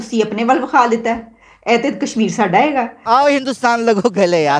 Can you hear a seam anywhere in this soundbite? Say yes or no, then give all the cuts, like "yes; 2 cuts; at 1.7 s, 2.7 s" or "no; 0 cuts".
yes; 1 cut; at 3.0 s